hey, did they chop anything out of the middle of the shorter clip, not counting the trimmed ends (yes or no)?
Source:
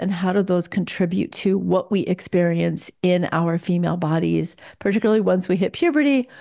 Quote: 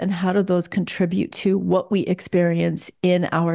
no